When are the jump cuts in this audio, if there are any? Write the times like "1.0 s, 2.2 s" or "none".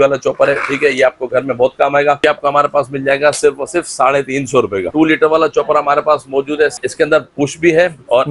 2.2 s, 4.9 s, 6.8 s